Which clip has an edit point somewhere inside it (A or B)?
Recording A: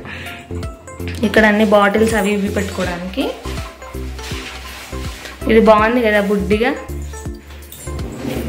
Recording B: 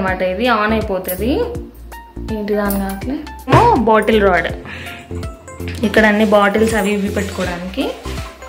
B